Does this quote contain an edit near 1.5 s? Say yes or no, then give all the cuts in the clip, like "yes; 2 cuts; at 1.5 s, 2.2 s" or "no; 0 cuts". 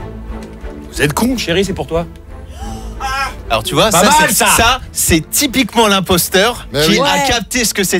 no; 2 cuts; at 3.4 s, 6.6 s